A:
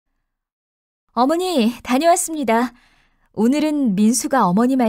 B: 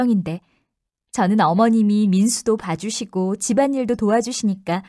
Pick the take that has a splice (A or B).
A